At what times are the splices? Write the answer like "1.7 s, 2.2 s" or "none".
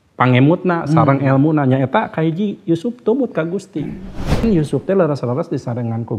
4.4 s